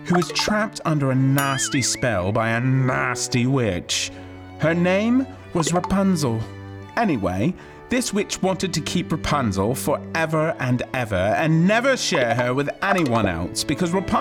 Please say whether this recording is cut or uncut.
uncut